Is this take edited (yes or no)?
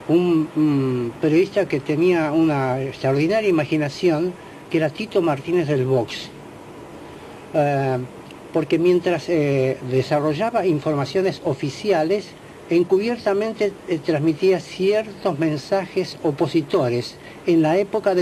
no